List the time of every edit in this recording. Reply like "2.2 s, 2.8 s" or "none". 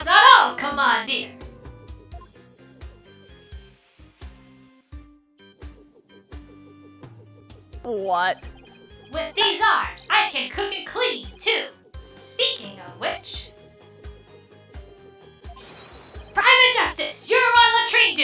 2.3 s